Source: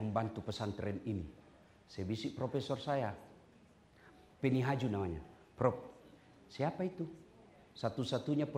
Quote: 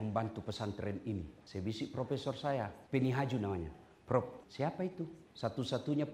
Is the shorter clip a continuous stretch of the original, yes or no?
no